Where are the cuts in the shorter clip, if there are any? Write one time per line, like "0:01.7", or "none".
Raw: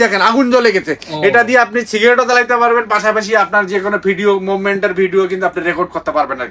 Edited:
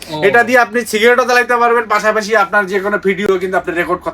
0:03.2